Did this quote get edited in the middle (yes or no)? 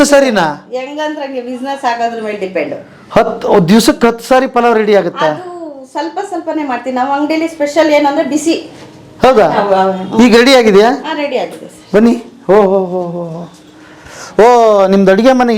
no